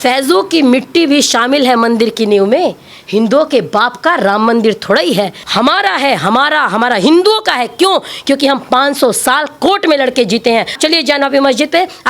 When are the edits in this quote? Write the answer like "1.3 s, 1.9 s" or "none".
5.4 s, 10.7 s